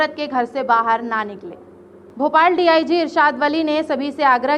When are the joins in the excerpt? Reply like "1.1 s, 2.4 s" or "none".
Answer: none